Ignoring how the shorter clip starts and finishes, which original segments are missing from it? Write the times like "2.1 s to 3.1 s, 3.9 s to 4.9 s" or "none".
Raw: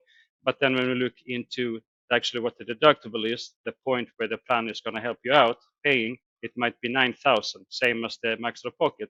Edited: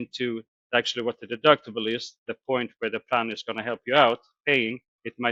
none